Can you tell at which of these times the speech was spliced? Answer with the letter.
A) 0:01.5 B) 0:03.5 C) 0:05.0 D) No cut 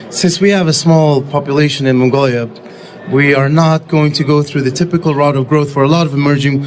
A